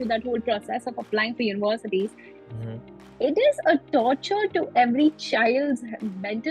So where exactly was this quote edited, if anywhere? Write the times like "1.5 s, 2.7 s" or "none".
none

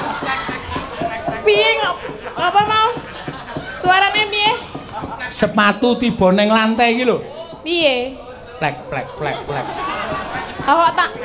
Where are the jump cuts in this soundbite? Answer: none

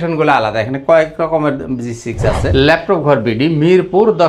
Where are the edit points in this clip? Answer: 2.5 s

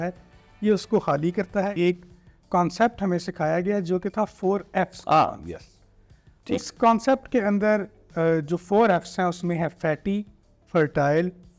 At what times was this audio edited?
1.7 s

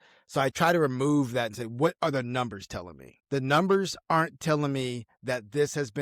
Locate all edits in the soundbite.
none

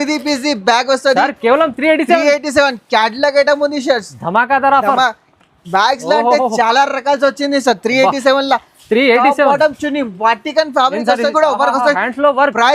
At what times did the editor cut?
11.3 s

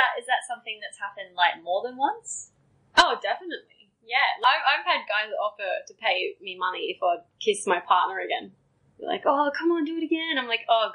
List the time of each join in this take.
4.4 s

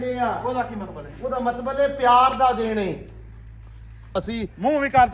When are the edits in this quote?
4.1 s

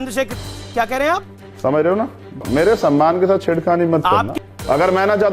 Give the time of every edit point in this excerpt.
2.4 s, 4.3 s

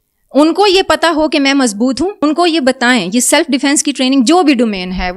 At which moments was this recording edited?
2.2 s

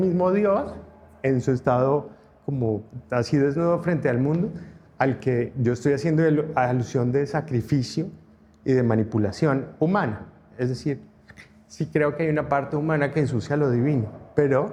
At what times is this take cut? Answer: none

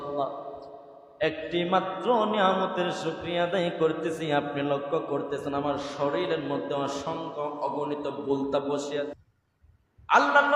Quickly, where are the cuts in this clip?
9.1 s

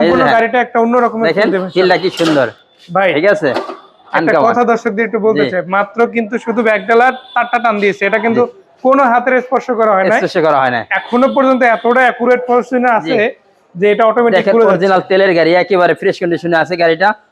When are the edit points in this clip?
none

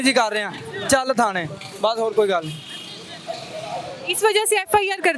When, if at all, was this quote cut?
none

